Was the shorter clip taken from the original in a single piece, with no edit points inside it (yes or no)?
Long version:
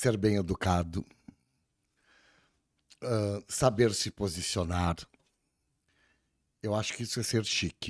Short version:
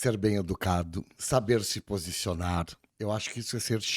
no